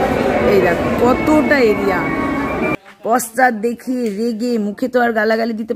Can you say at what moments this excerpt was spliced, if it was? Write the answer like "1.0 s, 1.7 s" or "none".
2.7 s